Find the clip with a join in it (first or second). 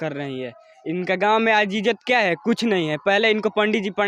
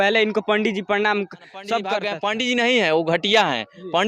second